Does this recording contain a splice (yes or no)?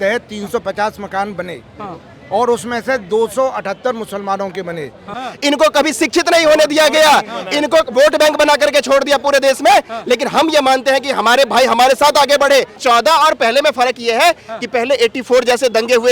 yes